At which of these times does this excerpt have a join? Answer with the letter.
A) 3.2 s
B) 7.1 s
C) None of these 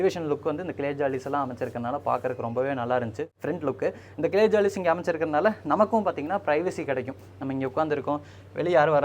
A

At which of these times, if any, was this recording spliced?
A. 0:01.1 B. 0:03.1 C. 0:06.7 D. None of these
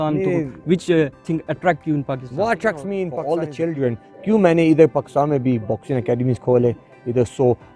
B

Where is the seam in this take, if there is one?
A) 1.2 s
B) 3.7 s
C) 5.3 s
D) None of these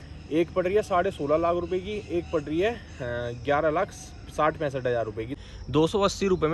C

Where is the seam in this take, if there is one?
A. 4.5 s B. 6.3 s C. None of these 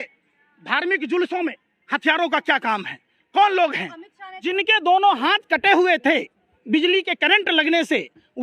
A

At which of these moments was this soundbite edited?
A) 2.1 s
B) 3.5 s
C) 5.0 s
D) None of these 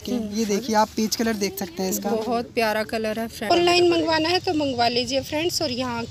B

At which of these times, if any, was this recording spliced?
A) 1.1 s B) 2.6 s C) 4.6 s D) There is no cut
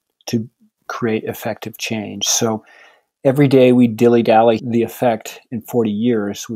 C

